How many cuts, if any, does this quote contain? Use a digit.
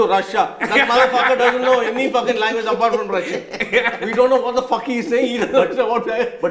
0